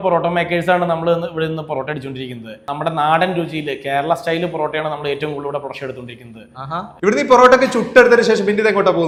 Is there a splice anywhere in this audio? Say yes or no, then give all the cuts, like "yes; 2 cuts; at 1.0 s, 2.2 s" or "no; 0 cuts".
no; 0 cuts